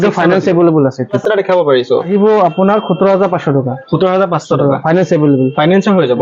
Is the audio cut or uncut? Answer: cut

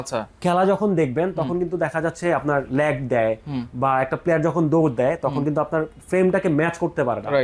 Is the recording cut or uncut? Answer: uncut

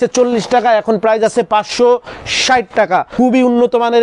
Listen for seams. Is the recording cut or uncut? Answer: cut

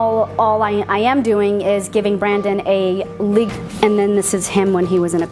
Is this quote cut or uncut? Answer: uncut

